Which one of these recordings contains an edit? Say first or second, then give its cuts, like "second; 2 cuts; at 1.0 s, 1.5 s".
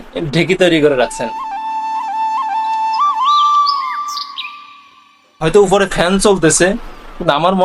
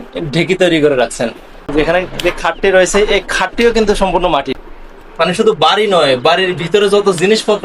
second; 2 cuts; at 1.4 s, 4.6 s